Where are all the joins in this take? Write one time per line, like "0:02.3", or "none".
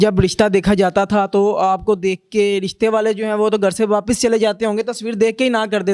none